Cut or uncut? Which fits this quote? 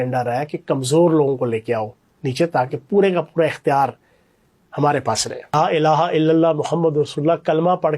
cut